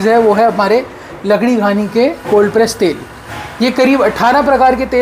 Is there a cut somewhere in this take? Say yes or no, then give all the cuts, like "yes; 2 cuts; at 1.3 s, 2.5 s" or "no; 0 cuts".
no; 0 cuts